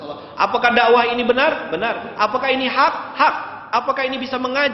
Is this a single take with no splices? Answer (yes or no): yes